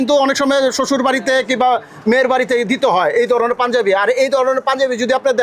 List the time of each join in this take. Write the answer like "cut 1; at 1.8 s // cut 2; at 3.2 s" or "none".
none